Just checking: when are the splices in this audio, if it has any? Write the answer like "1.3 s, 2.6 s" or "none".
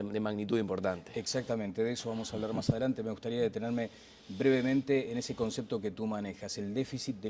none